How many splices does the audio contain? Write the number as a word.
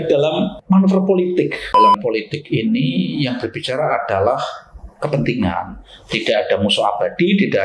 one